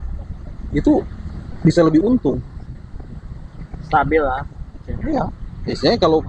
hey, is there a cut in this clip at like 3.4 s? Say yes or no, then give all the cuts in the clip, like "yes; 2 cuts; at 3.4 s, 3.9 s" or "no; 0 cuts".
no; 0 cuts